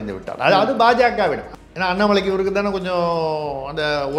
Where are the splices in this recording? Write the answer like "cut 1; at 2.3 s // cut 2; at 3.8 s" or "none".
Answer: cut 1; at 1.5 s